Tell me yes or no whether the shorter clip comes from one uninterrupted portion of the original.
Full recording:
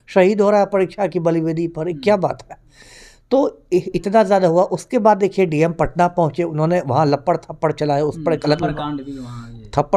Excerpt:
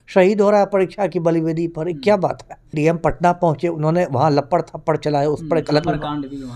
no